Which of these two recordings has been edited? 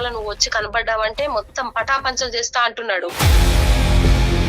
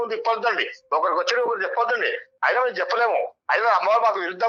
first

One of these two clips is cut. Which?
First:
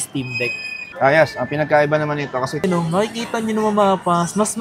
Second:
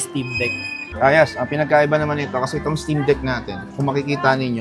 first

